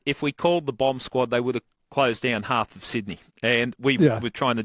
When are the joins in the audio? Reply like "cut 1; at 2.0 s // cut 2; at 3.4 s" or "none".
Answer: cut 1; at 3.2 s